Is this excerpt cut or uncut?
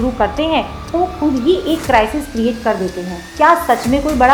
cut